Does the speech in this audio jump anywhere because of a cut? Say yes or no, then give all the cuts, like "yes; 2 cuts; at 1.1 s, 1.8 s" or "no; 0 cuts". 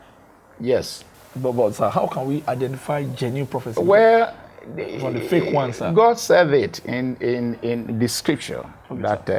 no; 0 cuts